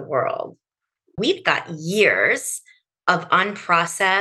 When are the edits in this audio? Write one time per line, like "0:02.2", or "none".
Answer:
0:01.2

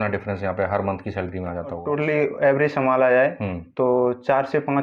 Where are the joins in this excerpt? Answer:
0:01.8

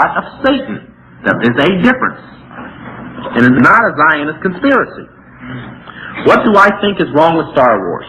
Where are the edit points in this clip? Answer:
none

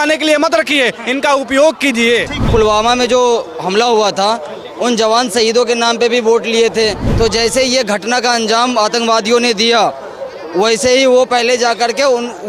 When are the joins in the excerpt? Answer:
0:02.4
0:07.0

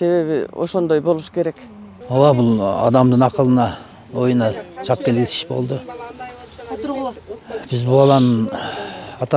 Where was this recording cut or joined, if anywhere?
0:01.9

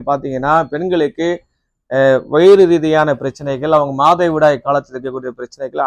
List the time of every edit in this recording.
none

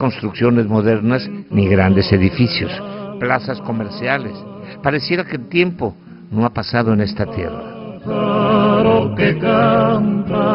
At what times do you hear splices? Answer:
0:03.5

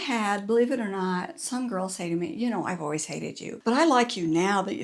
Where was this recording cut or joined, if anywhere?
none

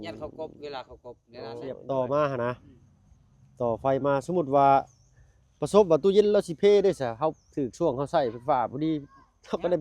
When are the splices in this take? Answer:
0:01.8

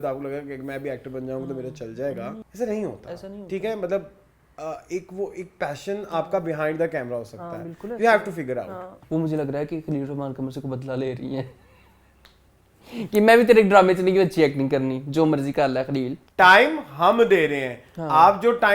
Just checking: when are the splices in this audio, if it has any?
0:02.4
0:08.8
0:16.2

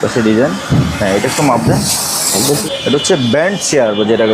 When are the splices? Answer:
0:02.6

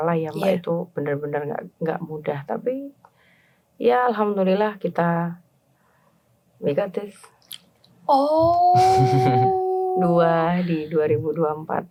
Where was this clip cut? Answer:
none

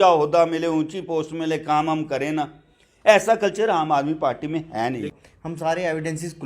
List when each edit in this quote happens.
0:05.2

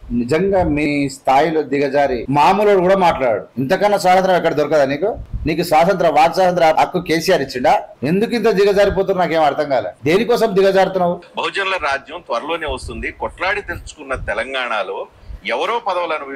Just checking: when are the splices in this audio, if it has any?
0:00.9
0:02.2
0:03.5
0:05.3
0:06.7
0:07.9
0:09.9
0:11.3

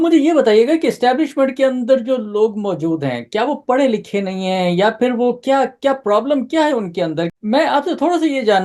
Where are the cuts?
0:07.3

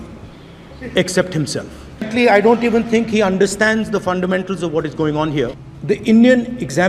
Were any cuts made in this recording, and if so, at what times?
0:02.1
0:05.5

